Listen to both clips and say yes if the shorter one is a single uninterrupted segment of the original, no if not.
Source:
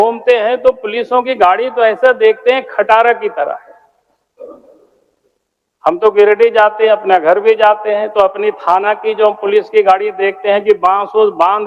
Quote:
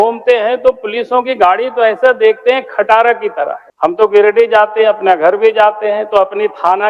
no